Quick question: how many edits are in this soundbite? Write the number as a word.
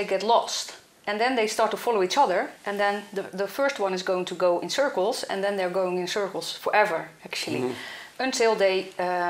zero